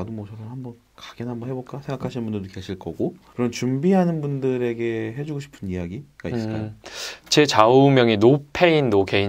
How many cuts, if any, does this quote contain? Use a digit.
1